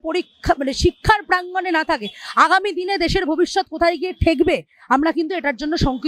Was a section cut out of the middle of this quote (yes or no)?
no